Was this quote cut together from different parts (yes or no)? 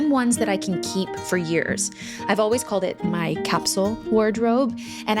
no